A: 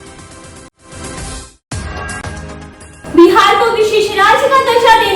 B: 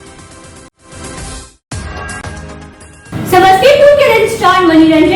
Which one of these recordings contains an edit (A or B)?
A